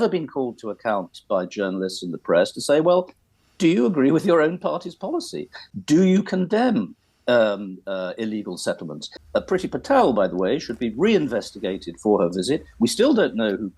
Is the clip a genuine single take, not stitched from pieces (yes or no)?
no